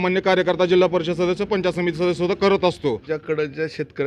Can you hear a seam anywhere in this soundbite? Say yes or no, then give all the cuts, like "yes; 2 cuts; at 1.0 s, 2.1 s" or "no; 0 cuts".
yes; 1 cut; at 3.1 s